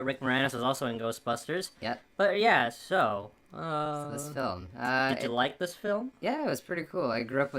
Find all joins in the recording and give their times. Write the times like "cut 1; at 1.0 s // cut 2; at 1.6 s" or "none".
none